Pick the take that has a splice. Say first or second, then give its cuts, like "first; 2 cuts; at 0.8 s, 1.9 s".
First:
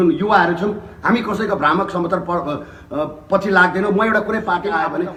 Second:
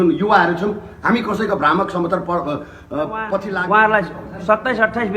second; 1 cut; at 3.5 s